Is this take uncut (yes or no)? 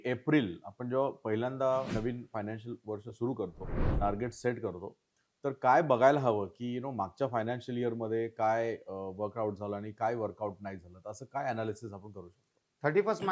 no